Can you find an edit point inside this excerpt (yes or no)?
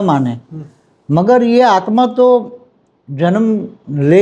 no